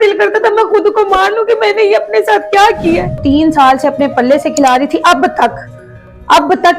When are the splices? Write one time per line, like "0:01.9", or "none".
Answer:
0:03.2